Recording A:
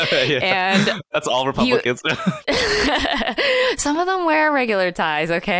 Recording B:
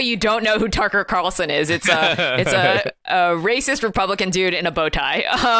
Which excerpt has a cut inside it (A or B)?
A